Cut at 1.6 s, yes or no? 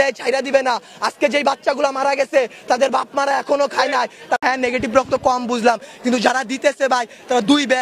no